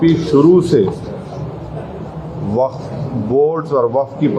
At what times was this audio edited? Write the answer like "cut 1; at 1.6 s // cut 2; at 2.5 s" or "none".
none